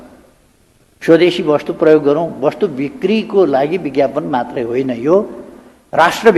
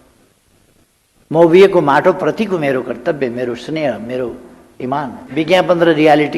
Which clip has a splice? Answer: second; 1 cut; at 5.2 s

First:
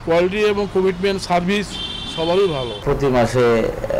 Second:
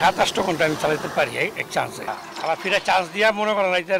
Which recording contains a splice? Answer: first; 1 cut; at 2.7 s

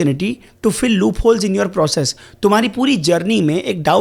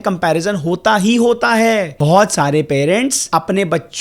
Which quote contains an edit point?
second; 2 cuts; at 1.9 s, 3.2 s

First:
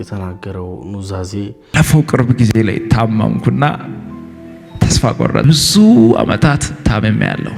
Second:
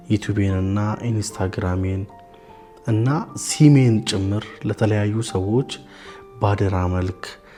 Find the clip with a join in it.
first; 2 cuts; at 1.7 s, 5.4 s

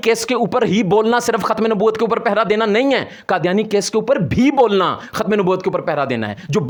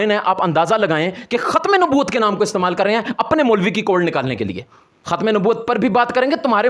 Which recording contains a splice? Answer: second; 1 cut; at 4.9 s

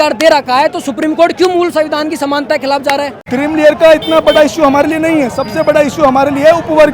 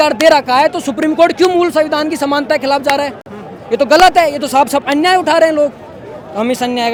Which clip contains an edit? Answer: first; 1 cut; at 3.2 s

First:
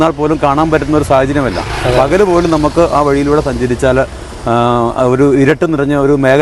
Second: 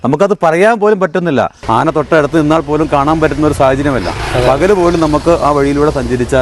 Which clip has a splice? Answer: second; 1 cut; at 1.6 s

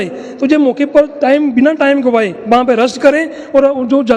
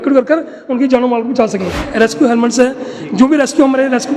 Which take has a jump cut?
second; 1 cut; at 1.8 s

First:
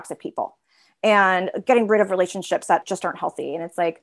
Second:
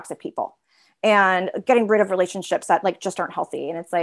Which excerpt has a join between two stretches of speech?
first; 1 cut; at 2.8 s

